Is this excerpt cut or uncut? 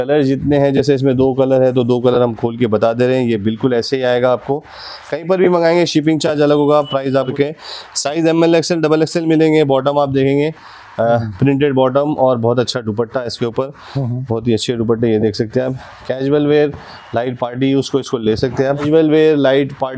cut